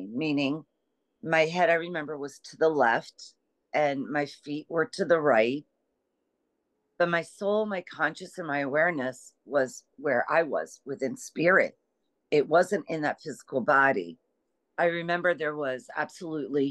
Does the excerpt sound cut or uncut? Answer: cut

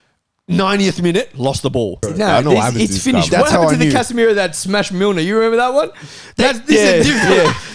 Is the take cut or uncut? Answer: cut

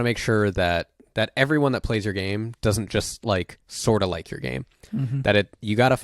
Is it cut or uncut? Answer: cut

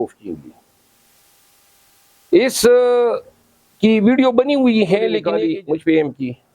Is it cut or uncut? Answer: cut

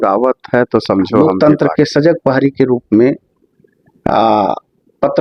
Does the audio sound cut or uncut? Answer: cut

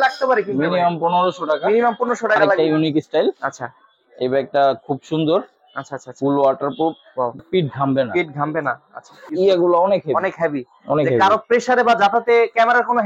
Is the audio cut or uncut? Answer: cut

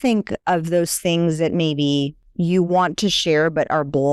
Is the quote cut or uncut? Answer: cut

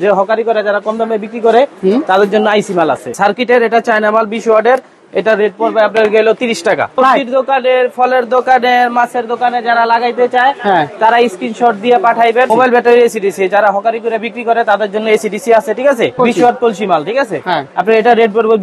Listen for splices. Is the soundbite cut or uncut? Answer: cut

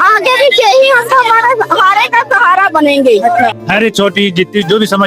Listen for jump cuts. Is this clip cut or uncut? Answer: cut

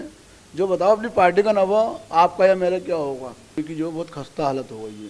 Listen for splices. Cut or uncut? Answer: cut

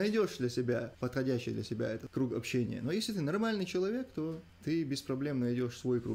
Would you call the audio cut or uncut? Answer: cut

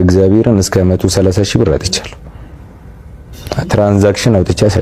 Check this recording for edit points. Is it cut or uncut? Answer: uncut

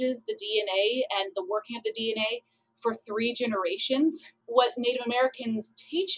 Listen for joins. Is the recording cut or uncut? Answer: cut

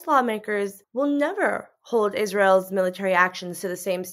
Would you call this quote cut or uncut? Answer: uncut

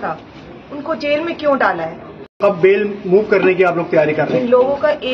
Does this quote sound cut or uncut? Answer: cut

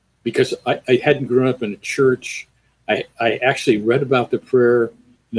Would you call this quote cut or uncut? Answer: uncut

